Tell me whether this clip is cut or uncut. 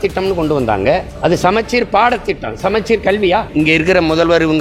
cut